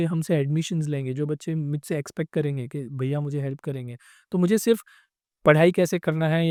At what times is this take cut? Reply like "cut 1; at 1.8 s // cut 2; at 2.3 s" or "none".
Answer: none